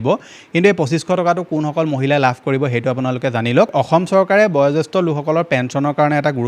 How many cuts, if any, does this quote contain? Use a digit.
1